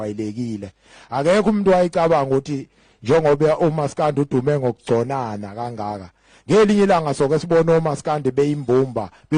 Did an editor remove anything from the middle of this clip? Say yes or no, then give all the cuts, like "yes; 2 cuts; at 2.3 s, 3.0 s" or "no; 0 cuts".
no; 0 cuts